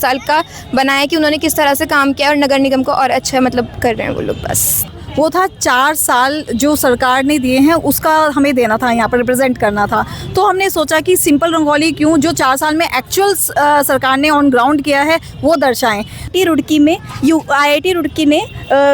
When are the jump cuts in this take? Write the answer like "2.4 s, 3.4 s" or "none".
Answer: 4.9 s, 16.3 s

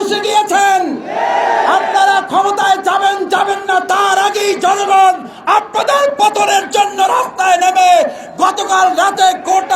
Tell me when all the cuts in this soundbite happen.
none

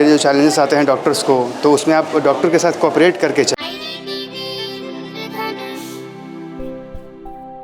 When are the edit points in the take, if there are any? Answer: 3.6 s

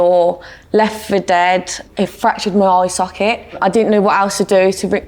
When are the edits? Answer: 1.8 s, 3.6 s

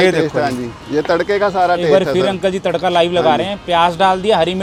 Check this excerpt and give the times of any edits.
none

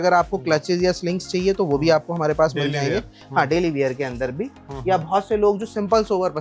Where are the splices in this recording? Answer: none

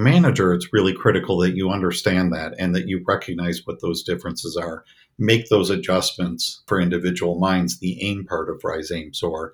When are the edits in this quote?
6.6 s

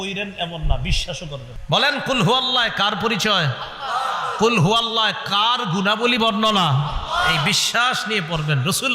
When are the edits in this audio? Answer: 1.5 s

